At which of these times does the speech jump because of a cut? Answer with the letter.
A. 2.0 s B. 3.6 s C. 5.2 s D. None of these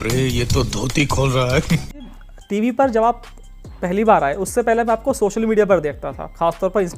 A